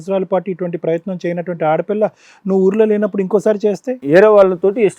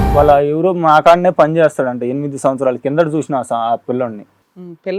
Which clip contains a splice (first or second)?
first